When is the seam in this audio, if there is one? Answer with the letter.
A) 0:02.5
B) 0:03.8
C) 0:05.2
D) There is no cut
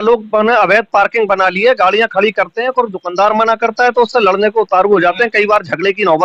D